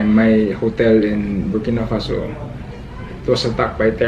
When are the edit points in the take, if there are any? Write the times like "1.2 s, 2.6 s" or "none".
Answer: none